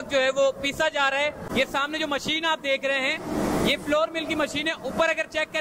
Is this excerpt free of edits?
no; 1 cut; at 1.4 s

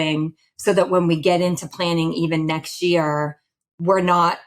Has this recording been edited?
no; 0 cuts

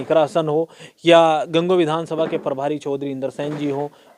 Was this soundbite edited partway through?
no; 0 cuts

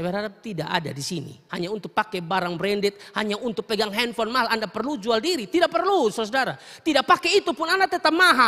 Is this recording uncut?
no; 1 cut; at 1.4 s

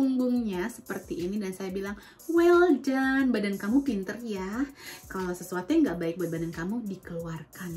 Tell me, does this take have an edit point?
no; 0 cuts

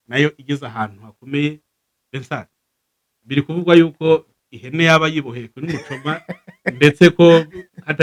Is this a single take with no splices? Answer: yes; 0 cuts

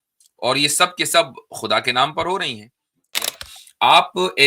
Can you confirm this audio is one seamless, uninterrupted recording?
no; 1 cut; at 3.1 s

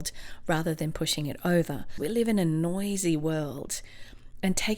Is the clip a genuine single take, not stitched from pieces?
no; 1 cut; at 2.0 s

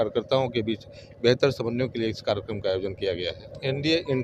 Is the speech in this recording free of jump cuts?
yes; 0 cuts

